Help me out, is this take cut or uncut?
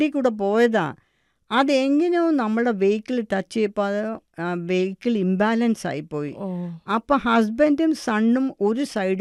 uncut